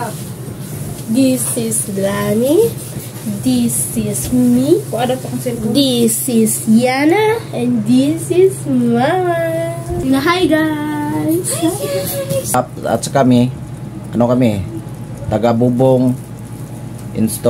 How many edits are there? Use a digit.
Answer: 2